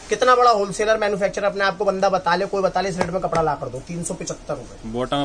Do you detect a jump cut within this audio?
no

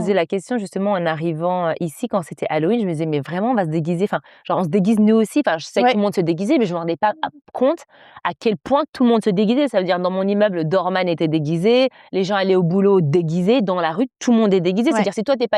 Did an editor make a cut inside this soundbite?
no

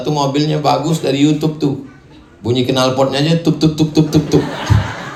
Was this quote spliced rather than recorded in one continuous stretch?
no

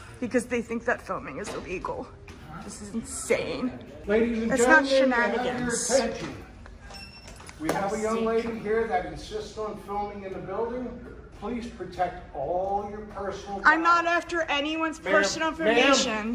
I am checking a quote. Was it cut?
yes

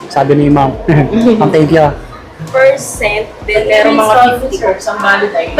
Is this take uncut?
no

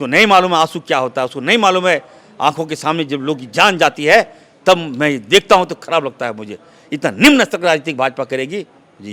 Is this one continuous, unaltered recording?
yes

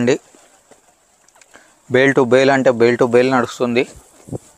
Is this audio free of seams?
yes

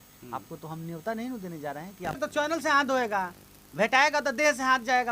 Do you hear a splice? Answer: yes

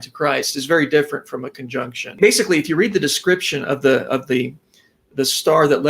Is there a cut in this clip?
yes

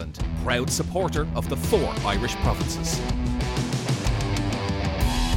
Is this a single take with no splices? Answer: yes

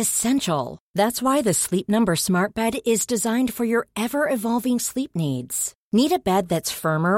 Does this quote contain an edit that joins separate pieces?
no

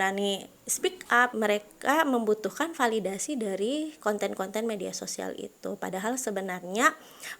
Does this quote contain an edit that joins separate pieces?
yes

